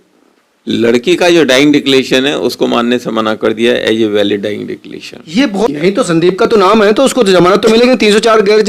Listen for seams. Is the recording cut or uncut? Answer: cut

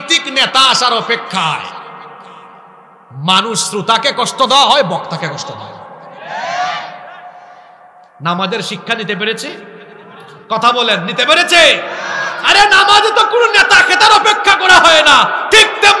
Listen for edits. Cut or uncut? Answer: uncut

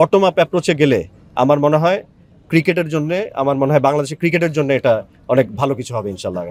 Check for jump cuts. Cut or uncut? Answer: uncut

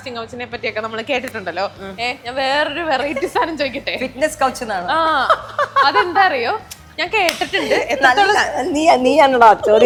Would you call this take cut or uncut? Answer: uncut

